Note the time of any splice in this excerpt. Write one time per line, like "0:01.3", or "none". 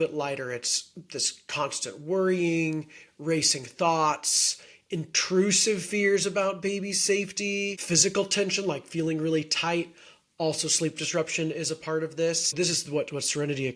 0:12.6